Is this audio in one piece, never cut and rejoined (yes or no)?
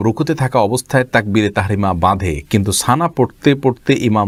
yes